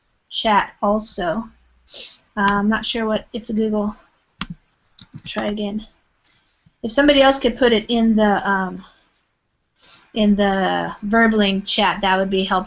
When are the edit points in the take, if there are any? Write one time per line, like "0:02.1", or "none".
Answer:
0:07.9